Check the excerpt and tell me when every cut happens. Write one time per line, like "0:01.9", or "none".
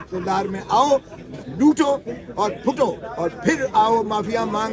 none